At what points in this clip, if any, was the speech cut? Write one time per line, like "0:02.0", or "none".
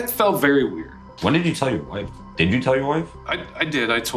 0:01.0